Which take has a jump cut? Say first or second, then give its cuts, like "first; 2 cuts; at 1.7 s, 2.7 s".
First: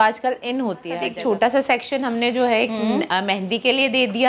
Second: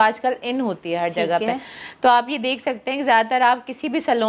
first; 1 cut; at 1.0 s